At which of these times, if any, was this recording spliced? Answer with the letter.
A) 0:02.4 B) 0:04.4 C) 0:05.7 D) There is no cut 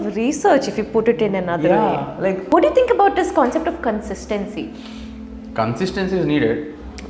A